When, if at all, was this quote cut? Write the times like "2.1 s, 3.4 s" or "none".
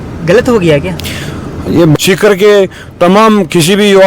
1.9 s